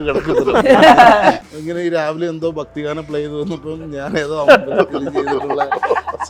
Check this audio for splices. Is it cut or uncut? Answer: cut